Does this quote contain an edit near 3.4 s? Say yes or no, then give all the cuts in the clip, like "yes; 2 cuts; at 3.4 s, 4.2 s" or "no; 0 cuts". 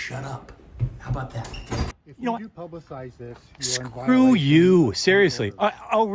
no; 1 cut; at 2.0 s